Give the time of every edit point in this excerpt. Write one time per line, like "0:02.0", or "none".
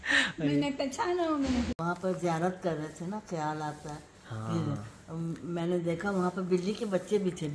0:01.7